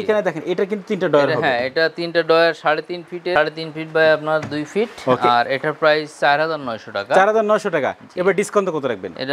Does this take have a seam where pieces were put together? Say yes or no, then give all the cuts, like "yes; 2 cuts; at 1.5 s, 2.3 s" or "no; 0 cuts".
no; 0 cuts